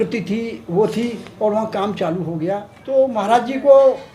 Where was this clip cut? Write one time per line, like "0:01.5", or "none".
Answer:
0:02.7